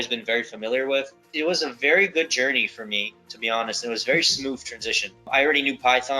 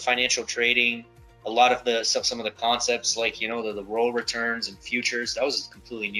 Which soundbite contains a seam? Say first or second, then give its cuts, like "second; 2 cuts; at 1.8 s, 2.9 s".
first; 2 cuts; at 1.2 s, 5.3 s